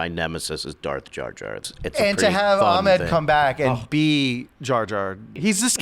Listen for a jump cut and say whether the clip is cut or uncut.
cut